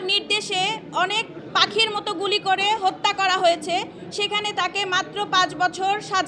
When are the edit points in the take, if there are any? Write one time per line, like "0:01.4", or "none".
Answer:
0:01.4